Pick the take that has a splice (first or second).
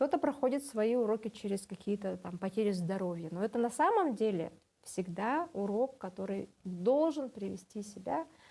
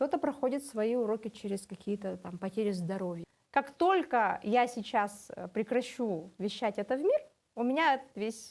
second